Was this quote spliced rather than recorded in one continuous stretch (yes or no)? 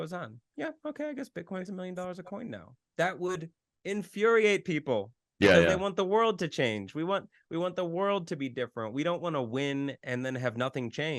no